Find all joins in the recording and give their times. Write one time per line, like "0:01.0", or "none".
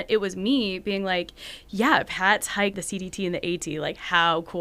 0:02.8